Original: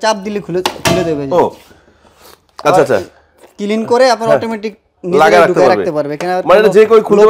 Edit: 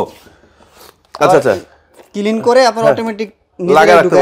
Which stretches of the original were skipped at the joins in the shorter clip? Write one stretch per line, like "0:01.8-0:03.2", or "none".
none